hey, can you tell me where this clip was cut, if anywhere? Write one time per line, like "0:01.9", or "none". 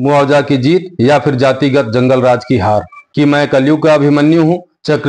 0:03.0